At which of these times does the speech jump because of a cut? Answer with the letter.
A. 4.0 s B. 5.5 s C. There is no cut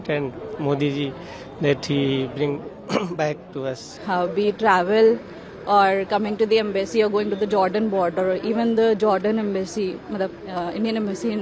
A